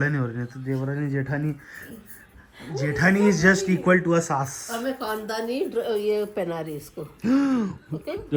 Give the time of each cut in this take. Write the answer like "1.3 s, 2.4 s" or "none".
none